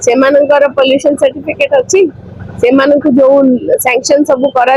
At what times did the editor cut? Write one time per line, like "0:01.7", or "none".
none